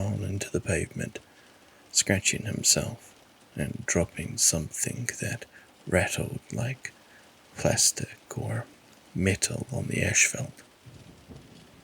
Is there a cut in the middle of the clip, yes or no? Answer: yes